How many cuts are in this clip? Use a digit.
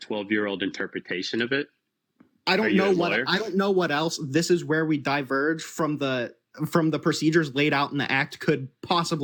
0